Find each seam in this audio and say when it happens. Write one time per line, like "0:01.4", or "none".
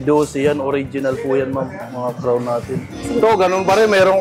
0:03.0